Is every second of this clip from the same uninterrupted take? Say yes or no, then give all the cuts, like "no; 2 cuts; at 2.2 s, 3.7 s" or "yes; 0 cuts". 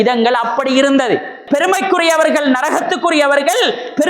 no; 1 cut; at 1.4 s